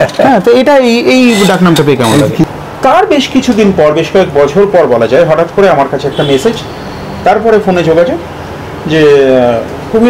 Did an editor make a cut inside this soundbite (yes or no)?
yes